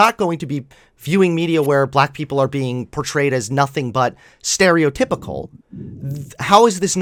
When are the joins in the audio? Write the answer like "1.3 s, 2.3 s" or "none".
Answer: none